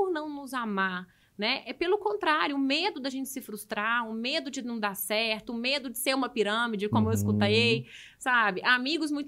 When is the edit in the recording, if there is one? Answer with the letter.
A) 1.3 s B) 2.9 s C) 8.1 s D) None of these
D